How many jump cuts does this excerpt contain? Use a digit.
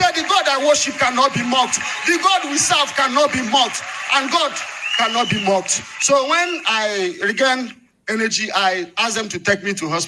0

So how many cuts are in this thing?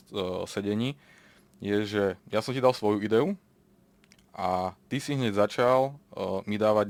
0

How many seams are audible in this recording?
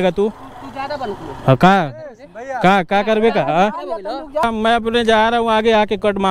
1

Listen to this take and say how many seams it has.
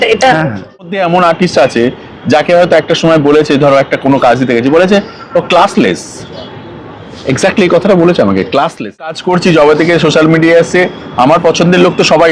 2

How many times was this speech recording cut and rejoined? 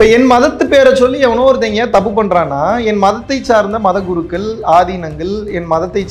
0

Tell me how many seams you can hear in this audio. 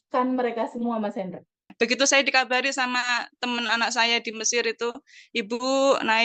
1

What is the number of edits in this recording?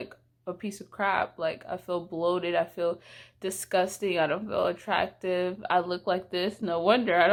0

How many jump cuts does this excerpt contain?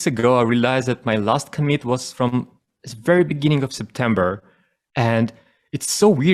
0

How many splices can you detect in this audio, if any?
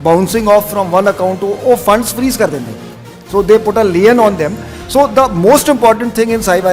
0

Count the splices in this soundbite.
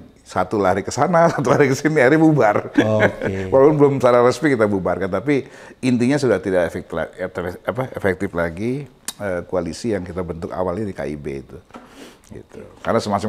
0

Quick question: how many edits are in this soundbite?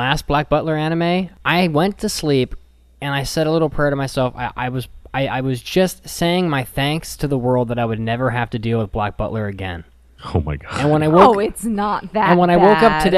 1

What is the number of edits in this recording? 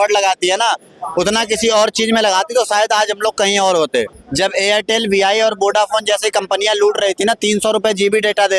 1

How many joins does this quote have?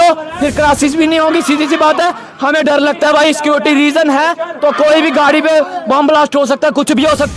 0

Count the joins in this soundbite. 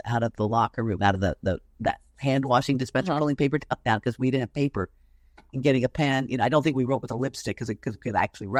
0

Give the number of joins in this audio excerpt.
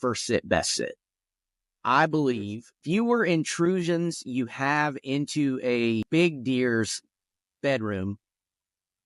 2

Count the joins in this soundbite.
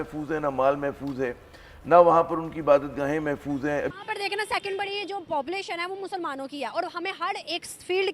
1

